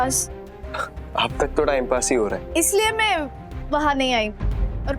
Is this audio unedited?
no; 1 cut; at 2.4 s

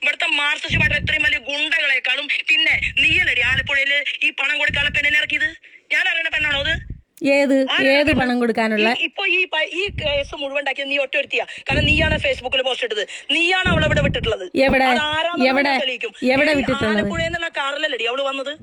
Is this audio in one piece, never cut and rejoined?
yes; 0 cuts

